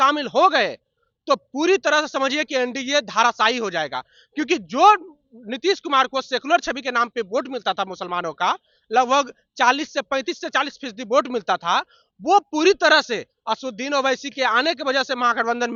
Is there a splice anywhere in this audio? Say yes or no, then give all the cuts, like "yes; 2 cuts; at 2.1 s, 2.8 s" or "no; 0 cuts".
no; 0 cuts